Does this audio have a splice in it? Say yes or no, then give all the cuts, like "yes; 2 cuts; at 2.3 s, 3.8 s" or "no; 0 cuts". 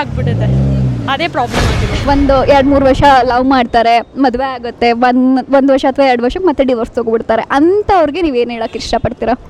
yes; 1 cut; at 2.0 s